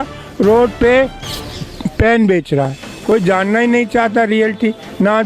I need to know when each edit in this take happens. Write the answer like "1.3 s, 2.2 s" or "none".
2.9 s